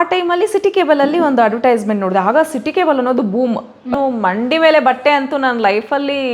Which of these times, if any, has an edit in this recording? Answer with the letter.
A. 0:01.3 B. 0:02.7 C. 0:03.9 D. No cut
C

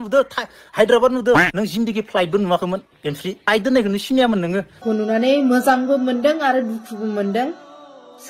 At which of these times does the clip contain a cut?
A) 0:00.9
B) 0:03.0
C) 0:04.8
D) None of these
C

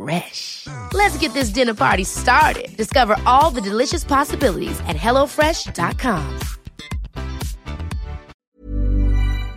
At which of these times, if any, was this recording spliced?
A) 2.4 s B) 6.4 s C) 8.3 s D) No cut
C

